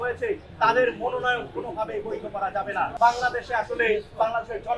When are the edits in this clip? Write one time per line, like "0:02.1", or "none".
0:02.9